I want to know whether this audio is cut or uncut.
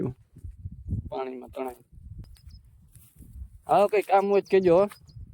cut